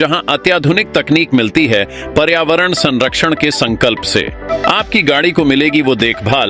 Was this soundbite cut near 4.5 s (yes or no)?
yes